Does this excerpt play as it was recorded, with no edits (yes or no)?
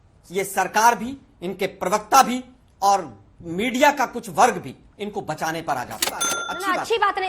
no